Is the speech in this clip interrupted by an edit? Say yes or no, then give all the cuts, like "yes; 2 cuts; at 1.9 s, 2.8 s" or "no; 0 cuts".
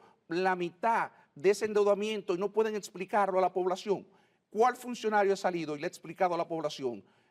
no; 0 cuts